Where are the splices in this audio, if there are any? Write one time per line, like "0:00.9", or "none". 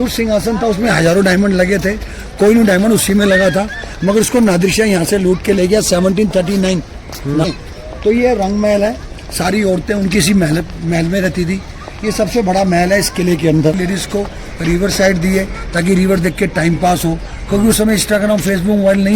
0:07.4
0:13.8